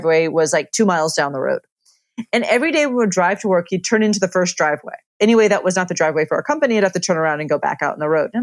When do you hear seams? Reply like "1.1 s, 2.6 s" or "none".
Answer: 5.1 s